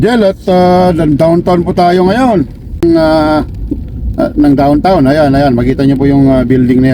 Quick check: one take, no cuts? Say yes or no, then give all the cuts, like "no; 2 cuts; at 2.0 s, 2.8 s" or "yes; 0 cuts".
no; 1 cut; at 2.8 s